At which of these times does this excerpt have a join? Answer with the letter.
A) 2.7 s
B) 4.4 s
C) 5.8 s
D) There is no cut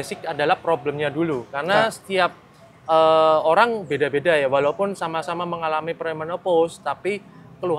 D